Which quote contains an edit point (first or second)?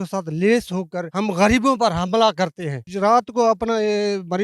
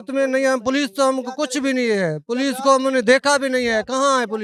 first